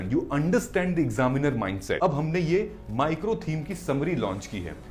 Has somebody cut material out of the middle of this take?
yes; 1 cut; at 2.0 s

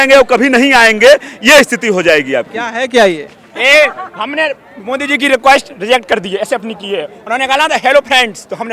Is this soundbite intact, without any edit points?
no; 1 cut; at 2.6 s

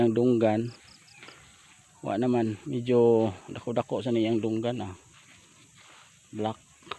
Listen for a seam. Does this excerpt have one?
no; 0 cuts

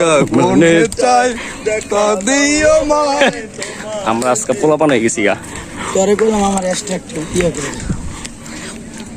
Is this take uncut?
yes; 0 cuts

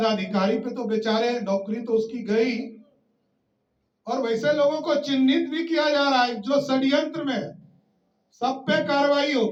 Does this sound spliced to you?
no; 0 cuts

